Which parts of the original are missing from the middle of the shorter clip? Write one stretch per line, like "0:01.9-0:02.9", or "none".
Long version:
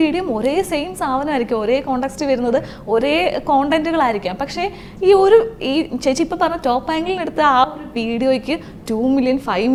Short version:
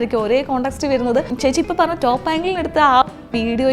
0:02.7-0:05.9

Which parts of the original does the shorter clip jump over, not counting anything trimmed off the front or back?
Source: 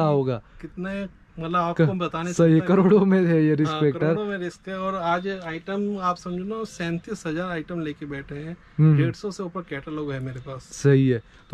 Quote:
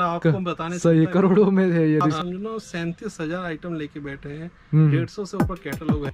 0:03.7-0:06.2

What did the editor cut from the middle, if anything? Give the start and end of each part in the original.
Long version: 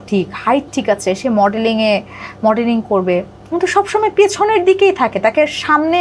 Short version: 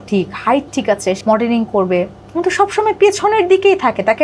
0:01.2-0:02.4

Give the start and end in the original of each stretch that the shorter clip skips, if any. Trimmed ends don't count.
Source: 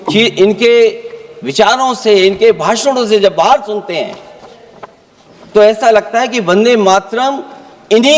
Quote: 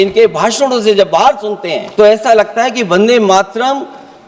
0:04.1-0:05.4

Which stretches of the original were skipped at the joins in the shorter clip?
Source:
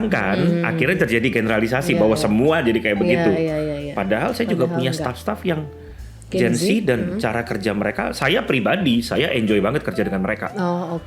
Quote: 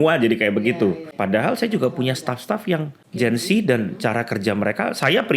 0:03.4-0:03.7
0:06.0-0:06.4

